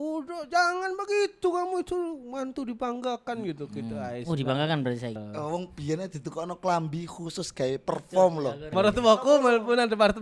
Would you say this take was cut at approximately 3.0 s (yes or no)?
no